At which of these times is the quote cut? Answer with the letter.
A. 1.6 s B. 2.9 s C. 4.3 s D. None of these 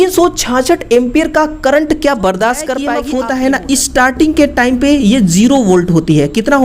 B